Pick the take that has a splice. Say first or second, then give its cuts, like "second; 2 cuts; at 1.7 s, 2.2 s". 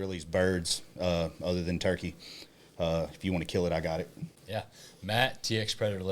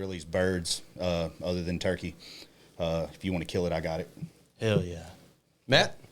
first; 1 cut; at 4.3 s